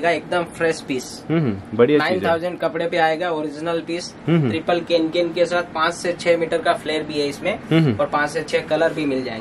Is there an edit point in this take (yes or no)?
no